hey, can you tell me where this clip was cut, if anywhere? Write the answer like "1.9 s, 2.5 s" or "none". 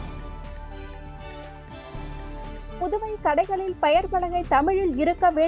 0.9 s